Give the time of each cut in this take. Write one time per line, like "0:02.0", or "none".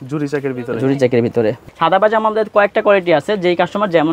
0:01.7